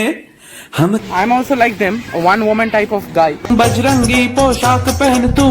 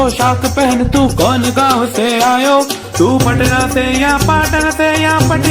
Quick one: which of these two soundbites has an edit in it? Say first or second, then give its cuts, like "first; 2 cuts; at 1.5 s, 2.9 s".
first; 2 cuts; at 1.0 s, 3.5 s